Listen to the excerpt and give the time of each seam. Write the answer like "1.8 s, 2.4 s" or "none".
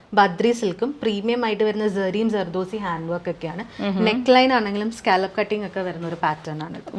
none

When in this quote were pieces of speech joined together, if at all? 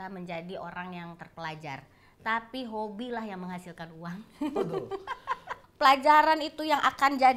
5.5 s

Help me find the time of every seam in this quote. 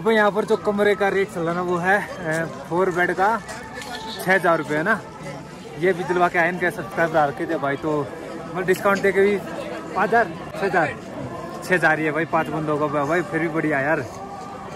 none

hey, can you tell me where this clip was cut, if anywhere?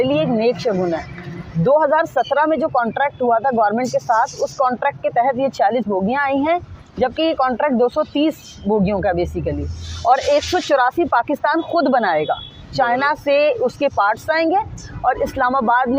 none

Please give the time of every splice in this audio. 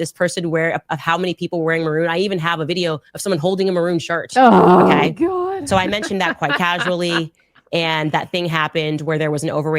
none

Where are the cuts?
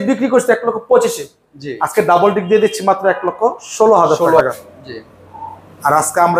4.4 s

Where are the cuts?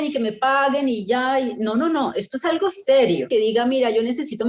3.3 s

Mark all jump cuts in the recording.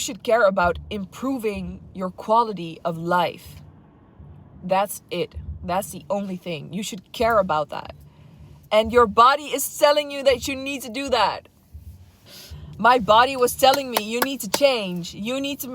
12.3 s

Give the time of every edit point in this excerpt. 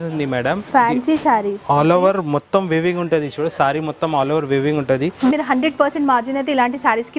5.3 s

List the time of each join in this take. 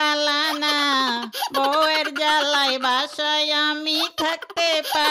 none

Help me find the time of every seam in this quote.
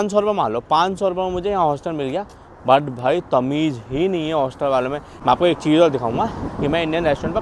5.1 s

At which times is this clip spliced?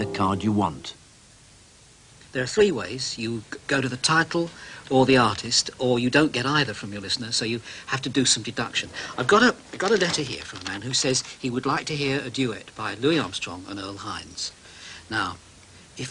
7.8 s

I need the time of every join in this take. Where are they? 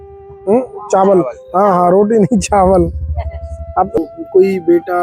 4.0 s

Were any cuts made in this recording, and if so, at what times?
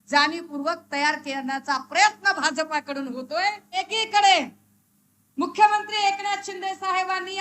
4.0 s

